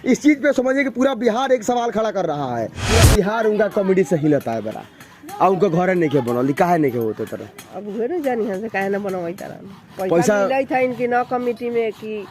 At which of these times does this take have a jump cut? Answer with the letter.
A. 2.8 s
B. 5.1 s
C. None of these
A